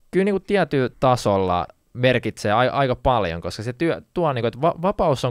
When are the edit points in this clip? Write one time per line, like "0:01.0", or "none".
0:00.9
0:01.8